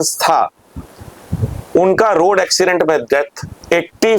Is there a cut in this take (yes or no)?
no